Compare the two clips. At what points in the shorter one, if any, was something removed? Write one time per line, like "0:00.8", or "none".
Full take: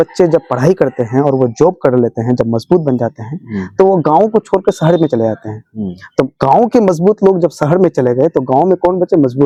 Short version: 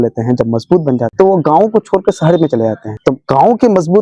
0:01.1
0:02.9